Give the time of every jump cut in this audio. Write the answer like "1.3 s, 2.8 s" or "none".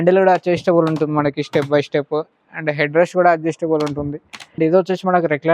4.4 s